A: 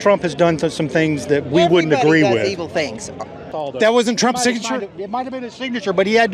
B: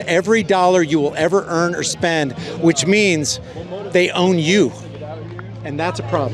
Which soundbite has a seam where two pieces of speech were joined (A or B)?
A